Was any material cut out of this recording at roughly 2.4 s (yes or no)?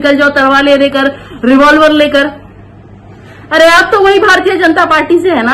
no